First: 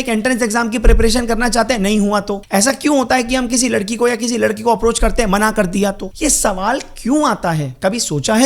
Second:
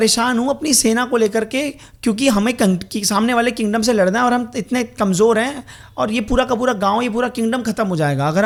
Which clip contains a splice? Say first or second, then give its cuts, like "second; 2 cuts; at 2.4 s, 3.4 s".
first; 2 cuts; at 2.4 s, 6.1 s